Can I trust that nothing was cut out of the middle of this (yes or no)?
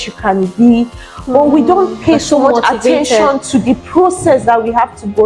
yes